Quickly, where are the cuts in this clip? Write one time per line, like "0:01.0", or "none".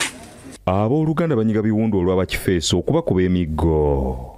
none